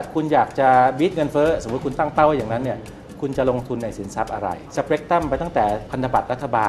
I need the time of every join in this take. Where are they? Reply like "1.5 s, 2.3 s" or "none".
4.7 s, 5.9 s